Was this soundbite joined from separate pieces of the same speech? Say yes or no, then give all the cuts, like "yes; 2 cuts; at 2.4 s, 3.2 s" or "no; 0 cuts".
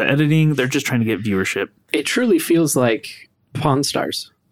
no; 0 cuts